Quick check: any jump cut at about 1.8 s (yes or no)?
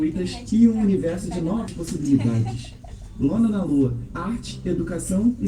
yes